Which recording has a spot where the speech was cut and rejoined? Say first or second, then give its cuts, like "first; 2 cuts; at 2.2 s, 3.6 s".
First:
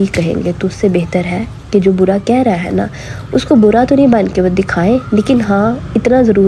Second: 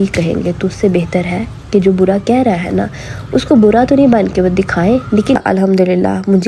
second; 1 cut; at 5.4 s